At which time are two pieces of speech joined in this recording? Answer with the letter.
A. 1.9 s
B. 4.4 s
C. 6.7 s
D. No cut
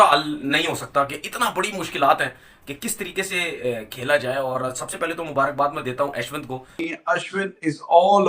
C